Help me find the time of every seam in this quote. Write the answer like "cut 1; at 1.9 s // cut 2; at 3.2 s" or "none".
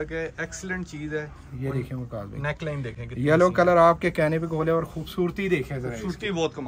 none

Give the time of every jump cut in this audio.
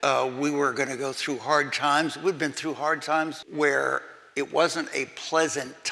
cut 1; at 3.4 s

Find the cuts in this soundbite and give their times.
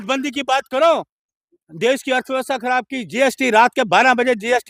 none

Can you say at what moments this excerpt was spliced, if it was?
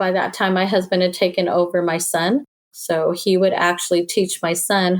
cut 1; at 2.8 s

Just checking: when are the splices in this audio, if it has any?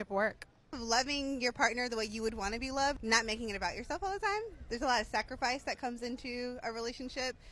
none

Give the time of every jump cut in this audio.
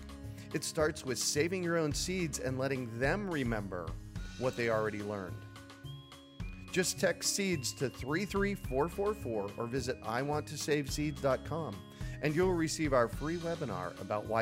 none

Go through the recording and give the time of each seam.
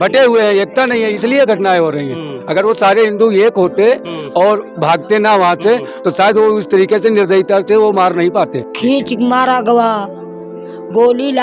cut 1; at 8.6 s

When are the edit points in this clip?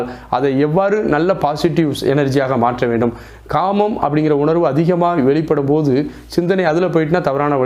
none

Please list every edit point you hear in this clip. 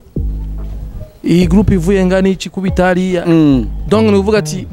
none

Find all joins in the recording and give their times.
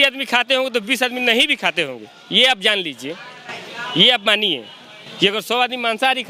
none

